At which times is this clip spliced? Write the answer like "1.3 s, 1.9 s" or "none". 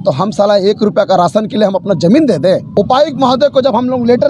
2.7 s